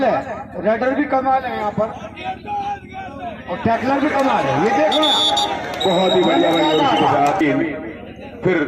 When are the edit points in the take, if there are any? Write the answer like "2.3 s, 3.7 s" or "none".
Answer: 7.4 s